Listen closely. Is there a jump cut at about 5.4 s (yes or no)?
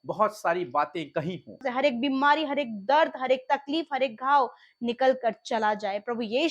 no